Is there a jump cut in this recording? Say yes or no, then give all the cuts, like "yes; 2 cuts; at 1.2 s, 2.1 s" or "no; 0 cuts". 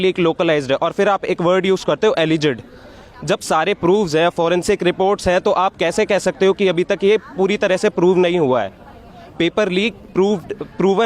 no; 0 cuts